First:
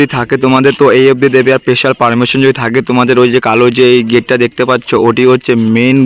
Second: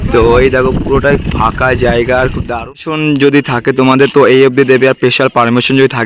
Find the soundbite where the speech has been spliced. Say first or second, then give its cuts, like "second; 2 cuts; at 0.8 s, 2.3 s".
second; 1 cut; at 2.5 s